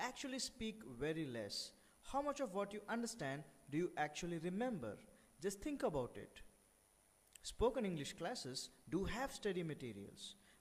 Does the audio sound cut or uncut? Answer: cut